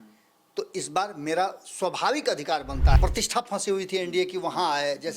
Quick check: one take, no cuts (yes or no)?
no